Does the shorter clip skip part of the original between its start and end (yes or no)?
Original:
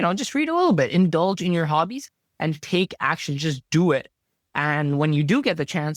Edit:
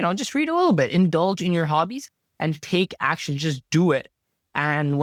no